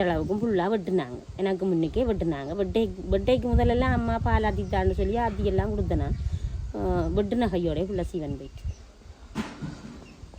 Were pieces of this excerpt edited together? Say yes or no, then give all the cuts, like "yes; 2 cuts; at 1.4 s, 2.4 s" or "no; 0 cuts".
no; 0 cuts